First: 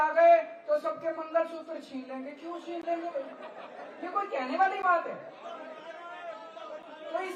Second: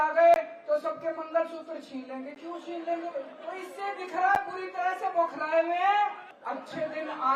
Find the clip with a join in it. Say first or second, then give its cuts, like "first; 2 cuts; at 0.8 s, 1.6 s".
second; 2 cuts; at 3.4 s, 6.3 s